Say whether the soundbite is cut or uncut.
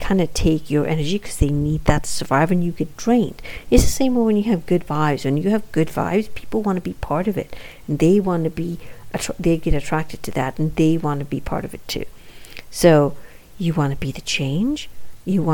uncut